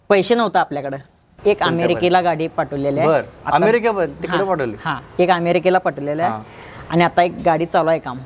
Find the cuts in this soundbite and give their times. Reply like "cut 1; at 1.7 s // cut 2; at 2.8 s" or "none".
cut 1; at 1.3 s